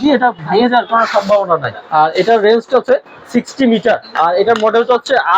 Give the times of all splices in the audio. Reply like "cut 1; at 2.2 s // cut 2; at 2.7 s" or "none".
cut 1; at 1.8 s // cut 2; at 4.1 s